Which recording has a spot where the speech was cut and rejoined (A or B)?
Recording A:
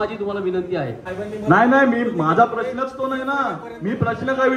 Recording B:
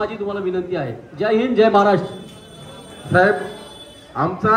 A